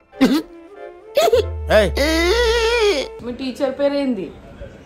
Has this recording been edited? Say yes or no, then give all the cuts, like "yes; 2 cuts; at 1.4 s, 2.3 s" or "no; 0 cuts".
yes; 1 cut; at 3.2 s